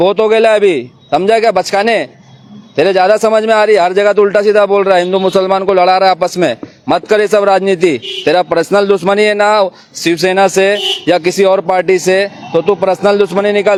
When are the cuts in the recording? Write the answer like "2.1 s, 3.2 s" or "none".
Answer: none